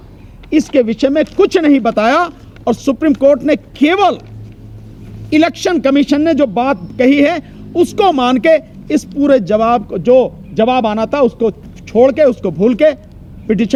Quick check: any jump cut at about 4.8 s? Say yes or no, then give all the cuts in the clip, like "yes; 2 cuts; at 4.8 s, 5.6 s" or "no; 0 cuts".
no; 0 cuts